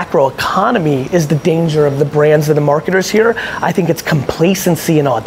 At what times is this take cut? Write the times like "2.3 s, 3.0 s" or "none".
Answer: none